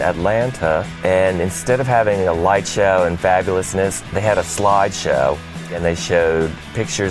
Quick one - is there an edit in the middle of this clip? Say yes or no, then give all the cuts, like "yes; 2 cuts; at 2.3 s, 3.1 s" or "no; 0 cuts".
yes; 3 cuts; at 0.9 s, 4.0 s, 5.8 s